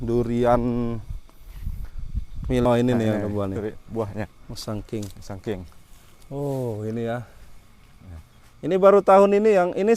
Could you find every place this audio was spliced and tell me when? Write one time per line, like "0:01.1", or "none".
0:02.7